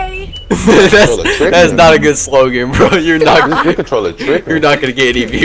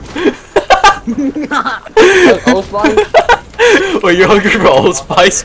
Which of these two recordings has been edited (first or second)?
second